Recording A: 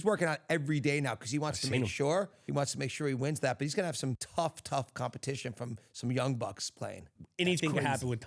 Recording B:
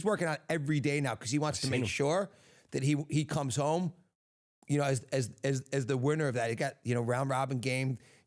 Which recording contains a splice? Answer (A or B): A